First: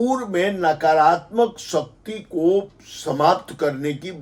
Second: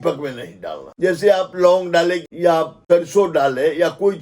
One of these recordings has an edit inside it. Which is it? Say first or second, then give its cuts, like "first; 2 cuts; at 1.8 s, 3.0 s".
second; 2 cuts; at 0.8 s, 2.3 s